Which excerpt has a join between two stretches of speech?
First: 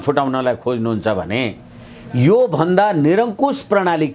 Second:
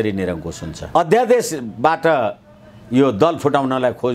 second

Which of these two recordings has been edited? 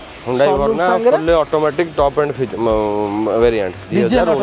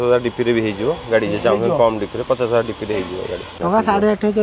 second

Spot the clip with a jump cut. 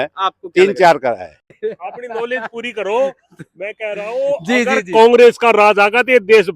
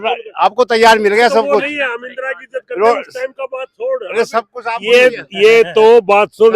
first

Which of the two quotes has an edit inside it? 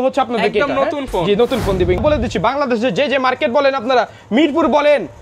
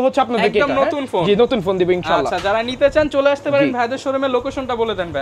first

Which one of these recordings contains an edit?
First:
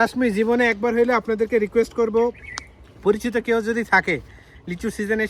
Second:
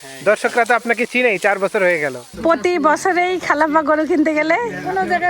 second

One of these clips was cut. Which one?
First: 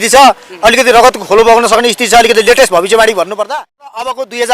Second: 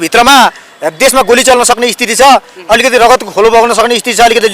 first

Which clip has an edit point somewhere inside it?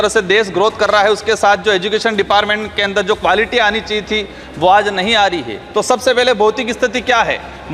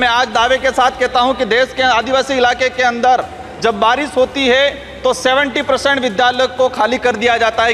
first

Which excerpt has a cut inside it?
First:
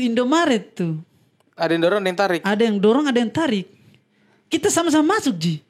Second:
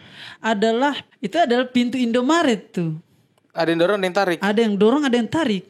second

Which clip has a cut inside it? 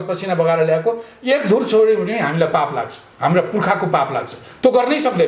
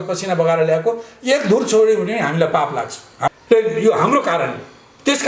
second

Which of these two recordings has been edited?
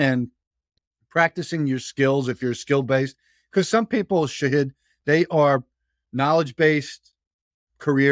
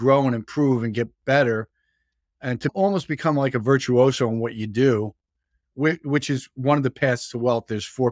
second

